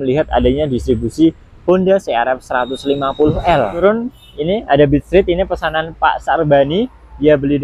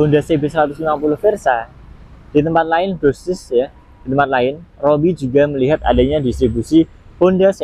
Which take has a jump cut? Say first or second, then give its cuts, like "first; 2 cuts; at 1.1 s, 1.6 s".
first; 1 cut; at 3.8 s